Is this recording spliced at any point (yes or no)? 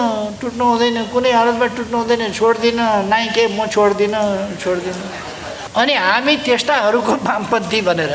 yes